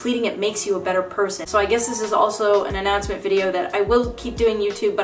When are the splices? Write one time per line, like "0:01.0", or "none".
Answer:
none